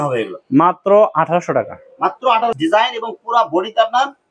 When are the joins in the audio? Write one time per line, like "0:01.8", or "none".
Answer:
0:02.6